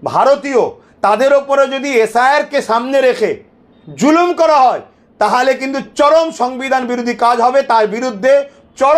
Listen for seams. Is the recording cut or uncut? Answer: uncut